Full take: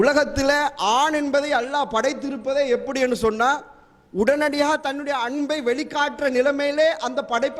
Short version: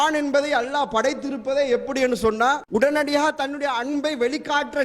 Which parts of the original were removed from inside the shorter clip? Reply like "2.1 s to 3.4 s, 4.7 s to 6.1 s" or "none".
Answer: 3.6 s to 4.1 s